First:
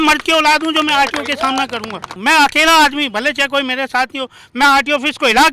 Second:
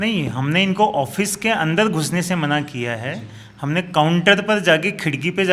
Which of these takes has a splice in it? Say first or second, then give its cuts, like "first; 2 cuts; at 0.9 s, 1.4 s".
first; 1 cut; at 2.2 s